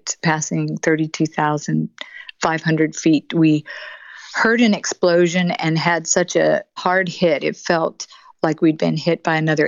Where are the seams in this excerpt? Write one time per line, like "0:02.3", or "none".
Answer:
0:06.8